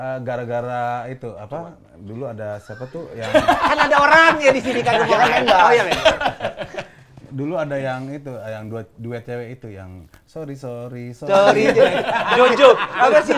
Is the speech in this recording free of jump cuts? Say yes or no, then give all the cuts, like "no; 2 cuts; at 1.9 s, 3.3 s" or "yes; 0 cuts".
yes; 0 cuts